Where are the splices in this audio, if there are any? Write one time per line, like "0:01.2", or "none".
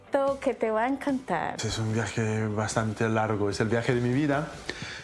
0:01.6

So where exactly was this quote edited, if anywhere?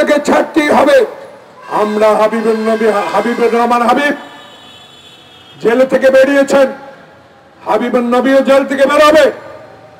none

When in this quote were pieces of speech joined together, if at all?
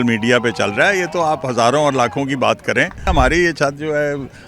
0:03.1

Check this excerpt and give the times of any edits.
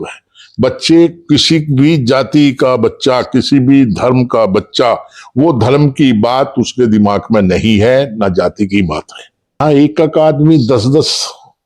0:09.6

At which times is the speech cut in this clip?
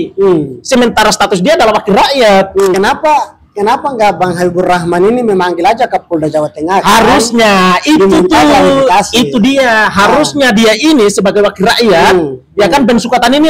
0:02.7

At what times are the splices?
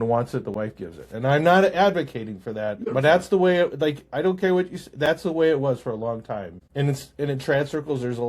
0:02.8
0:06.6

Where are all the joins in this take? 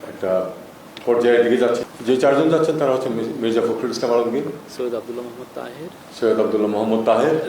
0:01.9

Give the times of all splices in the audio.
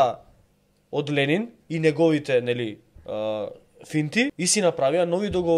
0:01.6
0:04.4

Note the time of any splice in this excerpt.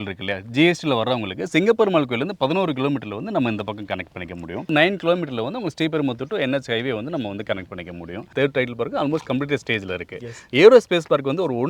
0:04.7
0:08.2

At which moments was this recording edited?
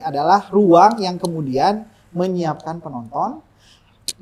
none

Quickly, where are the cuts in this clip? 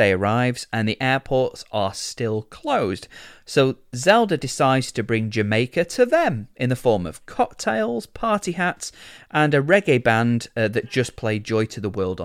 none

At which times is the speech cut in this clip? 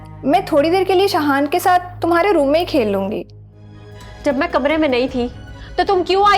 0:03.5

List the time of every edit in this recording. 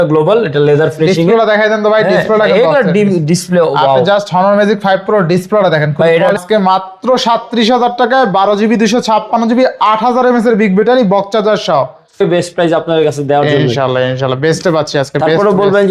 0:06.3
0:12.2

